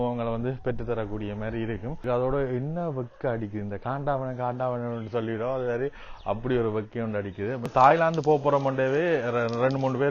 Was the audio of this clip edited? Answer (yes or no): yes